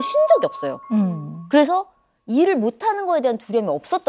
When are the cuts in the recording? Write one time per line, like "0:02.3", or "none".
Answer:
none